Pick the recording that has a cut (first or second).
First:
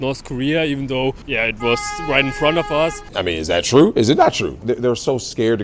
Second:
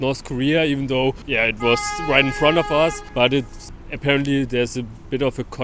first